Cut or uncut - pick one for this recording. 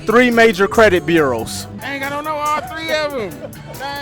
cut